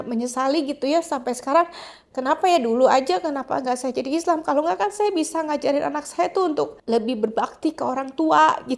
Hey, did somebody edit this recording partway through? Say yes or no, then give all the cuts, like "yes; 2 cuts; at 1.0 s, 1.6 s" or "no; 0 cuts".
no; 0 cuts